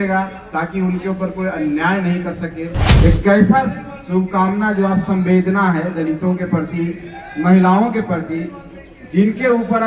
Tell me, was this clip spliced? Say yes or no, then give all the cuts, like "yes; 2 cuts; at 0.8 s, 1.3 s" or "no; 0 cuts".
yes; 1 cut; at 2.8 s